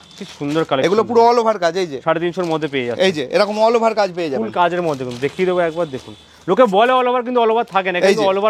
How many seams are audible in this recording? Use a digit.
0